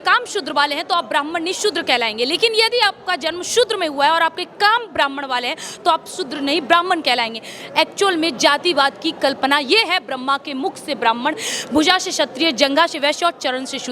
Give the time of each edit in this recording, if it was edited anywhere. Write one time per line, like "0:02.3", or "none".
none